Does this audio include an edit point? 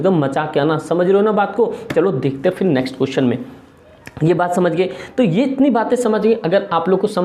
no; 0 cuts

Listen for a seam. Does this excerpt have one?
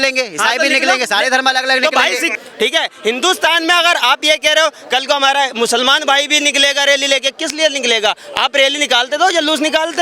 yes; 1 cut; at 2.3 s

